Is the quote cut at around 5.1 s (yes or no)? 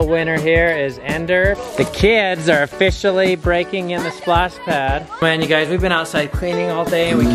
yes